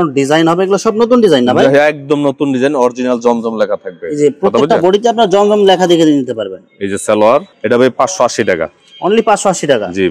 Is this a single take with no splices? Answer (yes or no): yes